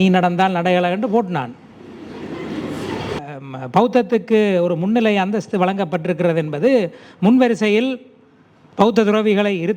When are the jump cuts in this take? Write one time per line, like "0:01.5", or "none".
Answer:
0:03.2